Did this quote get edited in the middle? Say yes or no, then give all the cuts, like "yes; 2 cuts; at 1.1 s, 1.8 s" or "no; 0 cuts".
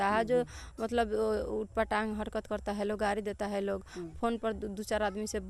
no; 0 cuts